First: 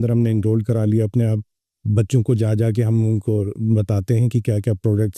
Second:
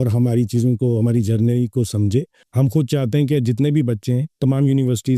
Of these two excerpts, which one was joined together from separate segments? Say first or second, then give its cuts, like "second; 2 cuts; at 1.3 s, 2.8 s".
second; 1 cut; at 2.4 s